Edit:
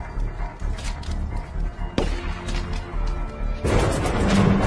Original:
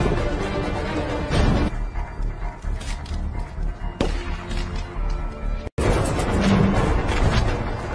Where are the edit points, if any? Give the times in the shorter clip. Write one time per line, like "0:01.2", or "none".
0:03.6